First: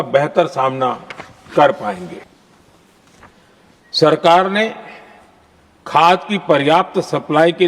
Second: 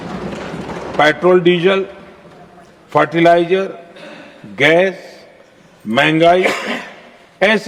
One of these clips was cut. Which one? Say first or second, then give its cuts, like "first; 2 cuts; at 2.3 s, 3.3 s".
first; 1 cut; at 2.2 s